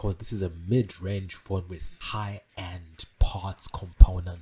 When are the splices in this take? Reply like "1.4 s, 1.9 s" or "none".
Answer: 1.9 s